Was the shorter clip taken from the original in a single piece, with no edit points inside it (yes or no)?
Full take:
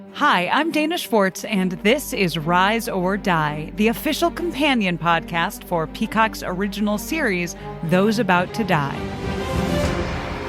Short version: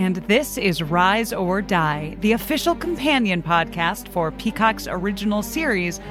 yes